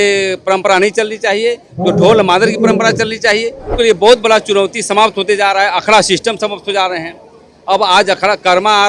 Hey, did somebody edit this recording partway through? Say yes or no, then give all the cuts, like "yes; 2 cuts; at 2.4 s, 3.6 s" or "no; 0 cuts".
yes; 1 cut; at 3.7 s